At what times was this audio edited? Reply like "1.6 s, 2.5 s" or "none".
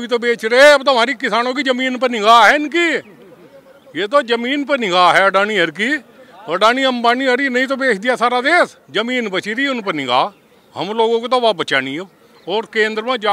8.8 s